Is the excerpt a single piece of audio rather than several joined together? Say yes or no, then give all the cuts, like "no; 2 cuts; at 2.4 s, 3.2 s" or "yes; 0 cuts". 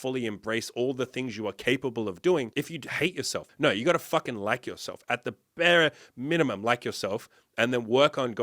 no; 1 cut; at 2.9 s